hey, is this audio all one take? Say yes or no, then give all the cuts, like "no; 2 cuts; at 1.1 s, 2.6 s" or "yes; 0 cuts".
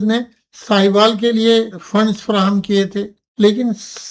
yes; 0 cuts